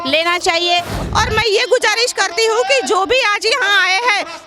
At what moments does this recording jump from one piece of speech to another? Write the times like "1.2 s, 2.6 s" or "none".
1.0 s